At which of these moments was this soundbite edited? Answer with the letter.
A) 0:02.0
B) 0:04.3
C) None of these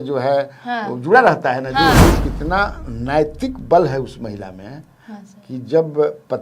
A